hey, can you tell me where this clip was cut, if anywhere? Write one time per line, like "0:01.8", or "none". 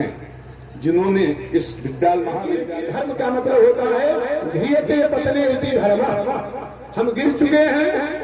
0:02.7